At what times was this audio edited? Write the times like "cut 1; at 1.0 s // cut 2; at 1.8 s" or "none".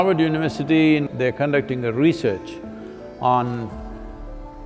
cut 1; at 1.1 s